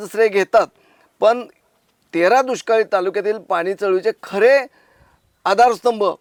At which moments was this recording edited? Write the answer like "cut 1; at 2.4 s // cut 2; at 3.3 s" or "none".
none